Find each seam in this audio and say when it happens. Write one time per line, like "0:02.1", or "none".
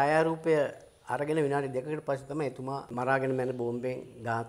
0:02.9